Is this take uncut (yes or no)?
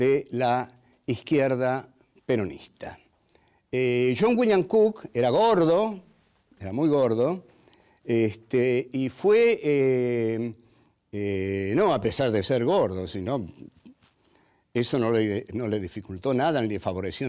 yes